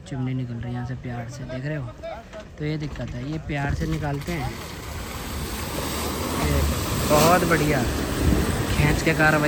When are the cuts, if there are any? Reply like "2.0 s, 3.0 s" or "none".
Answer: none